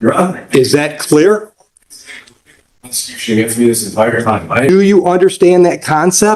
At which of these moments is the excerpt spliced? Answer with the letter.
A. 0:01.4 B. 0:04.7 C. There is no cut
B